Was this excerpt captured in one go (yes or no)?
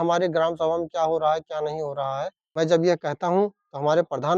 no